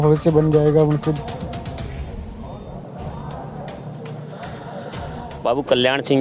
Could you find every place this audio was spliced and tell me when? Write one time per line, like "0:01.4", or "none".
0:05.3